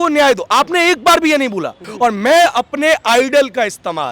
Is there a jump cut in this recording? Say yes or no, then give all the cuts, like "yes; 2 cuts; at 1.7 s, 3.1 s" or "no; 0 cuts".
yes; 1 cut; at 1.8 s